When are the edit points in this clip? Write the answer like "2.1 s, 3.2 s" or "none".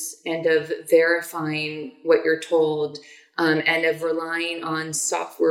none